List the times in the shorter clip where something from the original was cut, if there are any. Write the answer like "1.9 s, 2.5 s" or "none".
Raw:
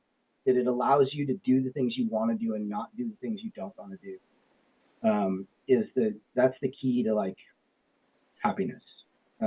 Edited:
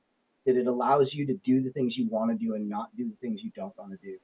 none